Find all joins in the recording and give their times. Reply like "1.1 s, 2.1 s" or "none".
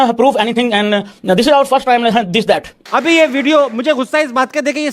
2.7 s